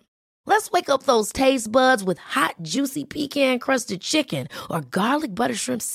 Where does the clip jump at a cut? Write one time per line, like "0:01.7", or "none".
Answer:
none